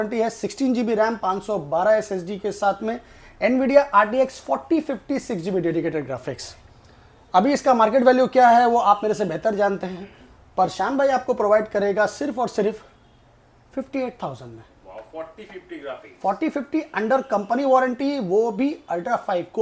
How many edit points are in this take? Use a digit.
0